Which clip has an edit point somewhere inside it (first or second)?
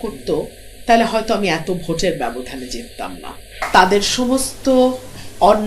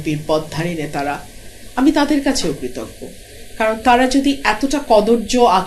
first